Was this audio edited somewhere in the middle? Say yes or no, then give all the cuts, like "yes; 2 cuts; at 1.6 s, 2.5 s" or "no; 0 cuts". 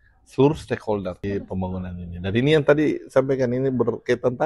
yes; 1 cut; at 1.2 s